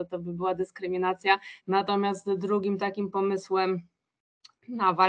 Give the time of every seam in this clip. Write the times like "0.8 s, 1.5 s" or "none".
1.5 s